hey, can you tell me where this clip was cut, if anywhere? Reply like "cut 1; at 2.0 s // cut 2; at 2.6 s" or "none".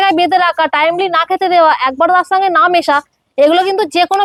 none